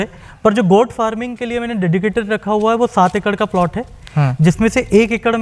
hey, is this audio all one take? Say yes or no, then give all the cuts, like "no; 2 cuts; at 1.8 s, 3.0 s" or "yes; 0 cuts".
yes; 0 cuts